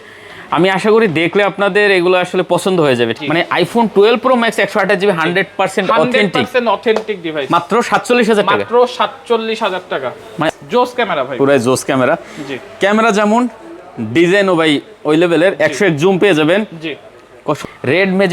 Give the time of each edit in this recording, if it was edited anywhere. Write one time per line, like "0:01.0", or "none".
0:03.2
0:10.5
0:17.6